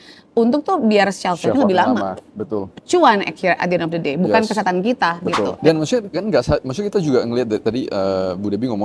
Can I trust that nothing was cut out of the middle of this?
no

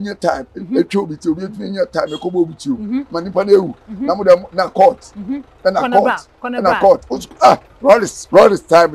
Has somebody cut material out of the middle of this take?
yes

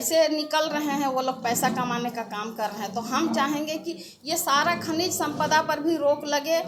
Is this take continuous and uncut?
yes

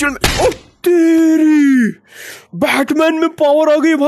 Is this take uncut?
yes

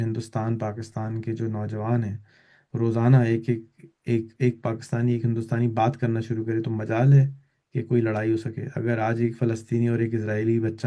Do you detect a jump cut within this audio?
no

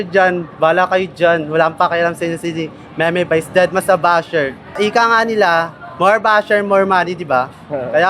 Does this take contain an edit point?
yes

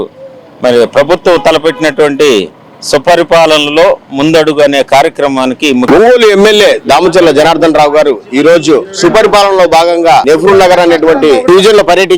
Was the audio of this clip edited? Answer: yes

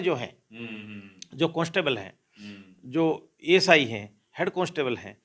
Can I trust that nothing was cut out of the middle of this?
yes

